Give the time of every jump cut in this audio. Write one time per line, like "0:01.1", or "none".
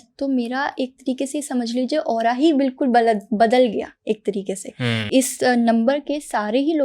0:05.0